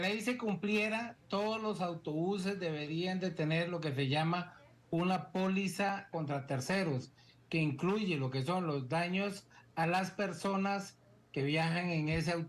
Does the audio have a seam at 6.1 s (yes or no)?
yes